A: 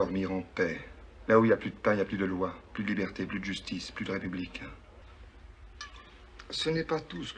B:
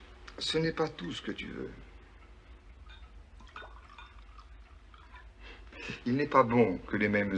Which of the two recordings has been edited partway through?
A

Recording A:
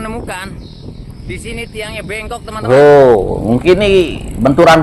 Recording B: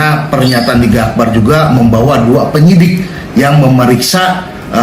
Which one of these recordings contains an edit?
A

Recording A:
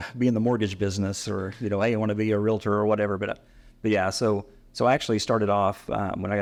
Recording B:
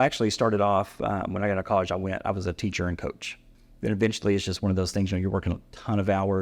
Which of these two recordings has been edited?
B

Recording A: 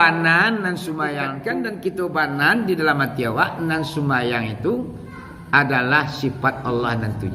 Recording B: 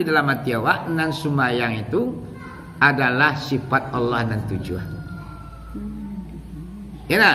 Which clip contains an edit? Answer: A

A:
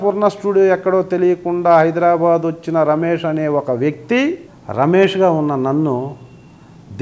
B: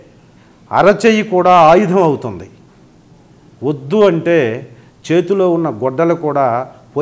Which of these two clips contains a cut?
A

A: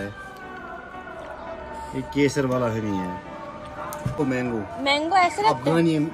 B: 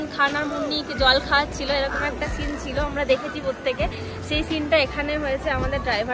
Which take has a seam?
A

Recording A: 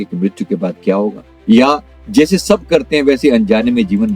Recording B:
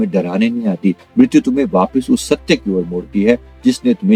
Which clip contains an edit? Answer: A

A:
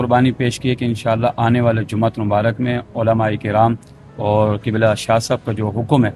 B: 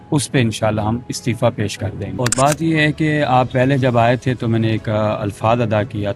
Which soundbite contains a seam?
B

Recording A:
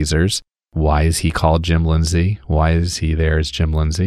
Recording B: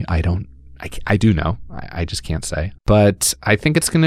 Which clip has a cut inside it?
B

